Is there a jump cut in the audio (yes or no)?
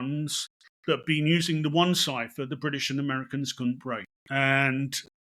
yes